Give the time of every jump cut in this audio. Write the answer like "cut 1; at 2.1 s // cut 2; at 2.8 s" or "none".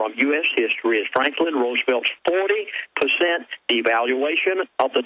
cut 1; at 2.7 s